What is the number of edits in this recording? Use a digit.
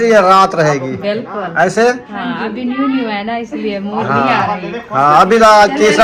0